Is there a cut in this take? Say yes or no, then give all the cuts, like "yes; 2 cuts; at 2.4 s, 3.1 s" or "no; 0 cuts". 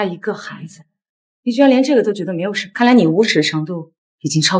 yes; 1 cut; at 2.6 s